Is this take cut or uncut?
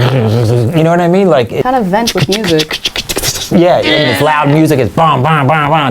cut